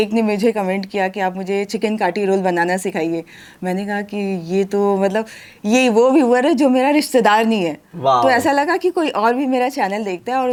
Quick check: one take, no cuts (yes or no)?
yes